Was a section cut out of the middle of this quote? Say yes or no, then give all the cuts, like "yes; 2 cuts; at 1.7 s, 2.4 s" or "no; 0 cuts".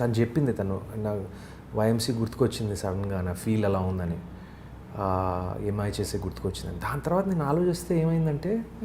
no; 0 cuts